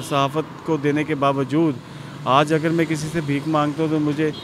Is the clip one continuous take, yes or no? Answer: yes